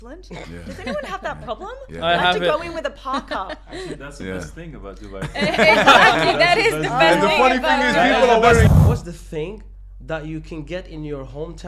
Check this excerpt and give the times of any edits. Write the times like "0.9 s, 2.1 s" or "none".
8.7 s